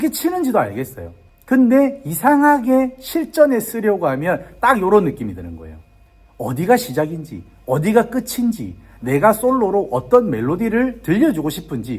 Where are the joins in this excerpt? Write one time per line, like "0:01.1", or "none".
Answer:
none